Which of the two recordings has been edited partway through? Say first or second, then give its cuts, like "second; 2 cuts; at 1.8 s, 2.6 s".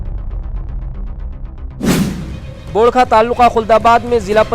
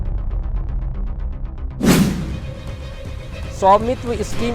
first; 1 cut; at 2.5 s